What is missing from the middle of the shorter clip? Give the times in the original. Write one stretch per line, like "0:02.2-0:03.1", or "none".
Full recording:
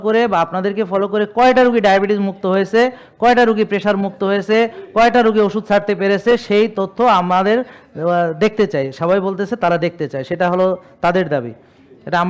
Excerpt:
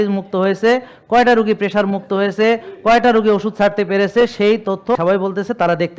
0:07.1-0:09.0